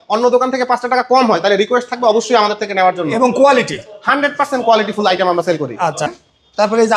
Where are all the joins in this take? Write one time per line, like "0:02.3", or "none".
0:06.1